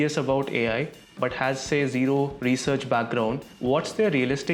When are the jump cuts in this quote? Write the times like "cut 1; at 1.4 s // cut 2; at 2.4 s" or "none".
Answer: cut 1; at 3.5 s